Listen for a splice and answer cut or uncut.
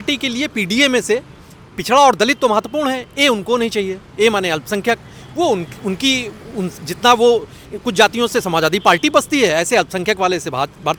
uncut